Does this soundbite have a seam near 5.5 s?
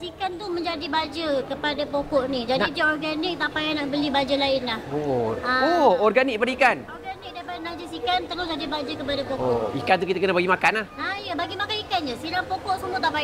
no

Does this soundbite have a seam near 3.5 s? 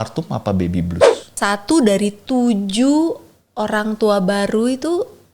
no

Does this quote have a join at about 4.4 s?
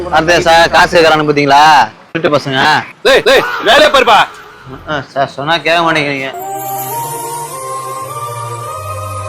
yes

